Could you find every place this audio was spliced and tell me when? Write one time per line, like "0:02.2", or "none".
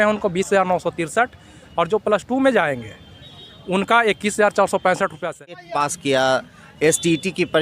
0:05.6